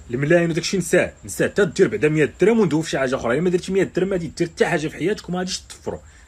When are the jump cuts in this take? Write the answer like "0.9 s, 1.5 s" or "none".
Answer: none